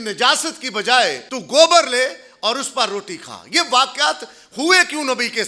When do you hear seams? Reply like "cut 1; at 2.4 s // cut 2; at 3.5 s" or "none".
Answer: cut 1; at 1.3 s